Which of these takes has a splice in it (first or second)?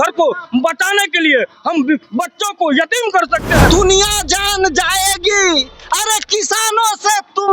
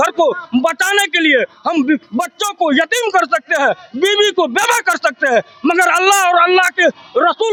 first